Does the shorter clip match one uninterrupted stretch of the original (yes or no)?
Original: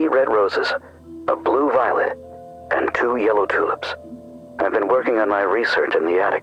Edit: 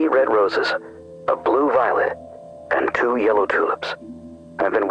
yes